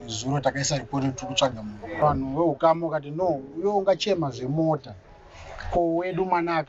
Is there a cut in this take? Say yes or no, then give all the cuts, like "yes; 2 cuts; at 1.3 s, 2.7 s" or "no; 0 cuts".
yes; 1 cut; at 2.0 s